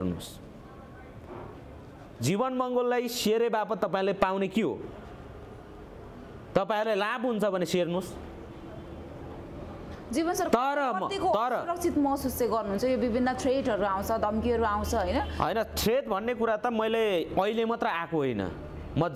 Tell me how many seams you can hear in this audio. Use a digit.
0